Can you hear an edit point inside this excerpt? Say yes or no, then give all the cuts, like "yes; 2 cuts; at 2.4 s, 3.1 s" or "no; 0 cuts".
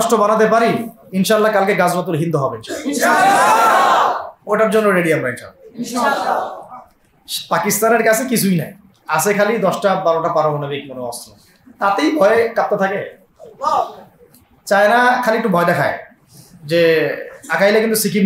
no; 0 cuts